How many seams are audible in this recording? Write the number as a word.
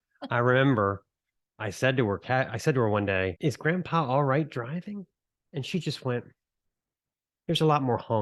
one